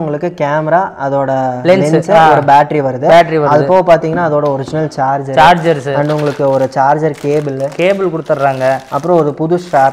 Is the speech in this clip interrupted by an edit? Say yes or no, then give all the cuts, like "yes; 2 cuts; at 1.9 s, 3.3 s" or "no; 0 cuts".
no; 0 cuts